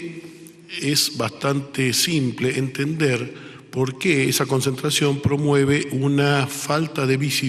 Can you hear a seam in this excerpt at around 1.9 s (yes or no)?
yes